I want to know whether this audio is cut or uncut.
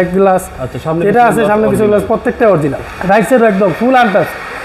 cut